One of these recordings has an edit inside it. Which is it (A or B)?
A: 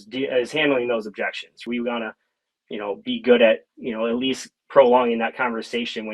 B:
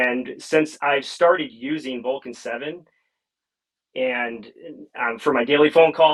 A